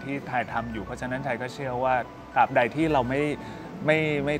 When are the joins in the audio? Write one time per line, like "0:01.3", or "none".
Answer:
none